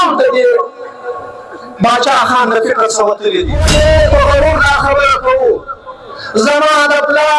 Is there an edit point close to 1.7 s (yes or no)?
no